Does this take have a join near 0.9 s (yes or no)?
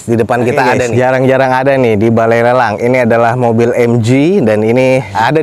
yes